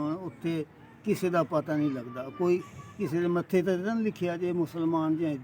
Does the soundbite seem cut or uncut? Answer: uncut